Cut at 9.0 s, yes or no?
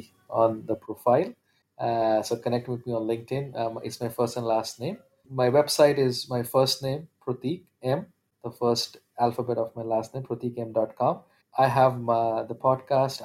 no